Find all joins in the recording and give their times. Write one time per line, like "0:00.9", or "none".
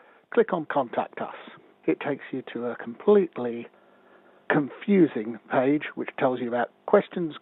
0:05.8